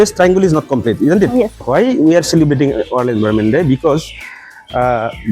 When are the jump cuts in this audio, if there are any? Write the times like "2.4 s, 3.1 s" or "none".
1.6 s